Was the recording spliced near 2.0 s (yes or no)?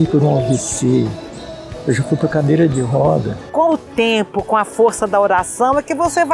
no